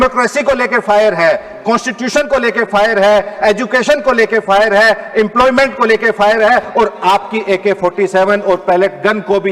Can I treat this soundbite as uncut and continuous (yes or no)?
yes